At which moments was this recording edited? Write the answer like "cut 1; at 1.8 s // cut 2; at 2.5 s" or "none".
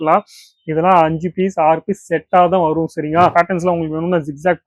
cut 1; at 3.3 s

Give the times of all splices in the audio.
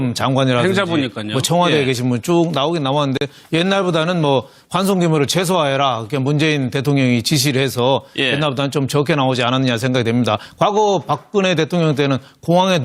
none

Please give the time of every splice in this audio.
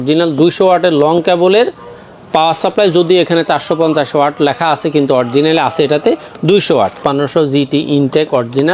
cut 1; at 7.0 s

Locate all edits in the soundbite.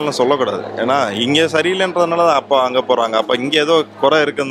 none

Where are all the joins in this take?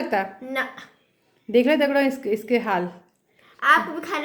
none

